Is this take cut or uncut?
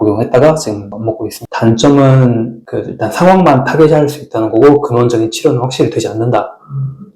cut